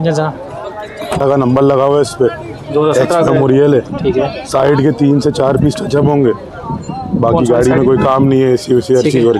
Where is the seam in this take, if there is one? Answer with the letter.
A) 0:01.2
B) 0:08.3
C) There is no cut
A